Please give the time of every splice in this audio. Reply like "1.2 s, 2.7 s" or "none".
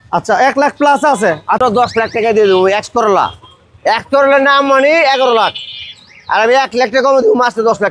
1.6 s